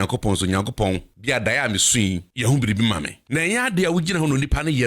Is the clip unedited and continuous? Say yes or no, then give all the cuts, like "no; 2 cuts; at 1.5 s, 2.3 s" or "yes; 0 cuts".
no; 3 cuts; at 1.1 s, 2.3 s, 3.2 s